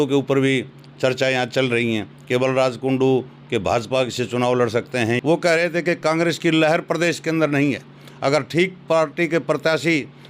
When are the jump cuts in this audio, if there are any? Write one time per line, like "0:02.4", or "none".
0:05.2